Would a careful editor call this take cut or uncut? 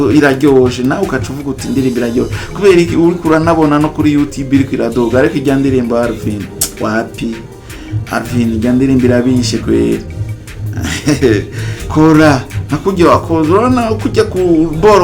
uncut